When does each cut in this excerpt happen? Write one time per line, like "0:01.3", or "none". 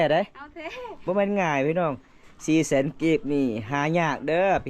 0:01.0